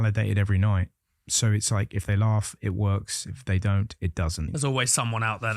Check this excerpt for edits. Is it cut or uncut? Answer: cut